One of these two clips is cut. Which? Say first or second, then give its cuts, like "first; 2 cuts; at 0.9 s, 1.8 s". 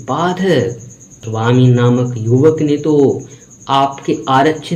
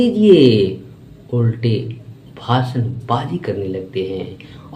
first; 1 cut; at 1.2 s